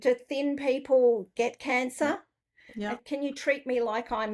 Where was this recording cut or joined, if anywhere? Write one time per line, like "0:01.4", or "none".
0:02.3